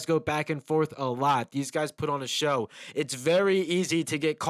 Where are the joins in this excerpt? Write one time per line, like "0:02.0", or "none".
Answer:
none